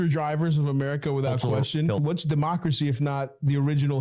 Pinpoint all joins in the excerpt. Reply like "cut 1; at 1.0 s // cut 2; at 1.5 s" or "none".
cut 1; at 2.0 s